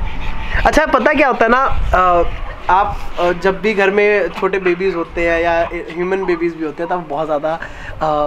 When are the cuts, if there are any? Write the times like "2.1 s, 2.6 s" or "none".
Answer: none